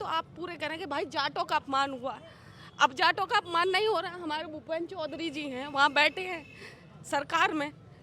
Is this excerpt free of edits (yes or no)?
yes